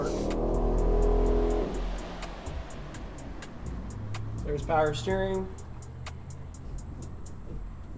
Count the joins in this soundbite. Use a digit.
0